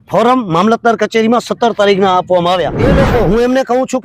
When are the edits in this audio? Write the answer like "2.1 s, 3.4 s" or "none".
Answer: 2.7 s

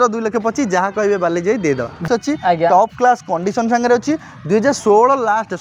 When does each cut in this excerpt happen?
2.1 s

